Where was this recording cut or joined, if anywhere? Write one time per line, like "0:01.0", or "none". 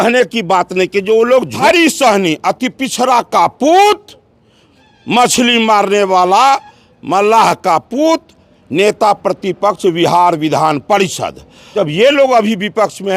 0:01.6
0:11.7